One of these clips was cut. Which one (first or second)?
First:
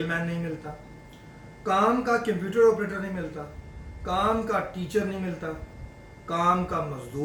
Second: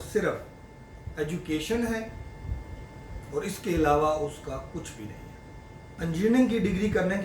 second